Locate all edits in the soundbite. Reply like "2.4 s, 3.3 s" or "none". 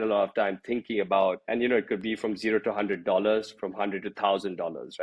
1.4 s

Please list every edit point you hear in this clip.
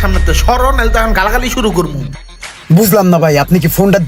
none

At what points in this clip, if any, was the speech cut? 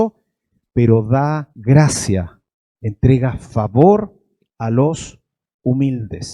1.5 s

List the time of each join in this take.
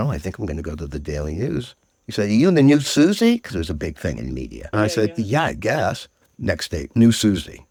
none

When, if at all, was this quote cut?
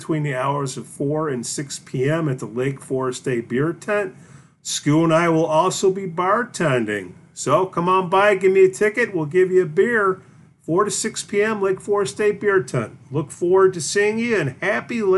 none

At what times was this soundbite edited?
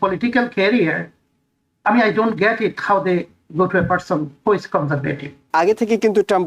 5.5 s

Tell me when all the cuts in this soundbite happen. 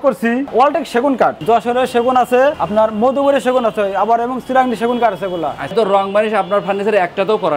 1.4 s, 2.6 s, 5.7 s

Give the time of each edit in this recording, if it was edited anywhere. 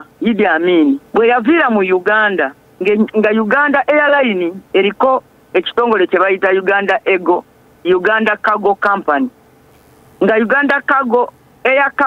1.0 s

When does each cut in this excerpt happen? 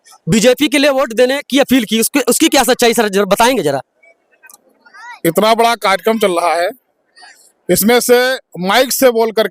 none

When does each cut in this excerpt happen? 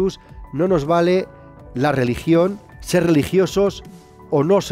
2.7 s

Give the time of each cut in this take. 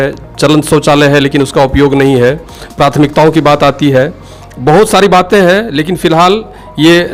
none

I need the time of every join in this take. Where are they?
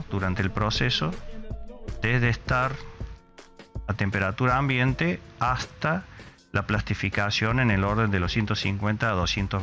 none

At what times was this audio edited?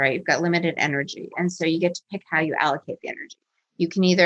none

